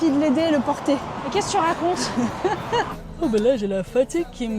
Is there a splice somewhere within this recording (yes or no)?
yes